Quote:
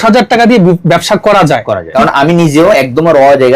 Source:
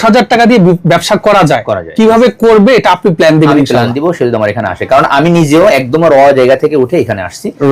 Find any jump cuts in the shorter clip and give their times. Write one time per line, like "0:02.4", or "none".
0:01.9